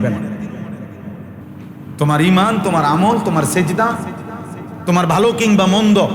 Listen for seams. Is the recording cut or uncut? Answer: cut